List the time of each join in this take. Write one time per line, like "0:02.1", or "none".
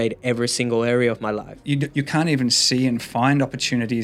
0:01.6